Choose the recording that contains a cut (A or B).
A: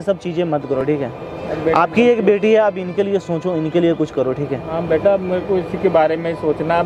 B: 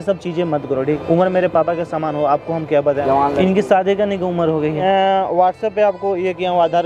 B